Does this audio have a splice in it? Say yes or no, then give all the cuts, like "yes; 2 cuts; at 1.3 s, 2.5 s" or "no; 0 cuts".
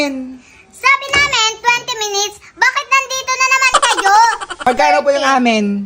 yes; 1 cut; at 4.6 s